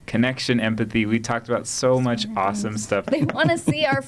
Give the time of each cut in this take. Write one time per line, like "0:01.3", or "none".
0:03.1